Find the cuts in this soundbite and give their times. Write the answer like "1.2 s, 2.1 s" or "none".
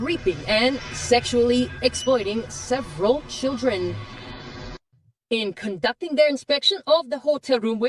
2.5 s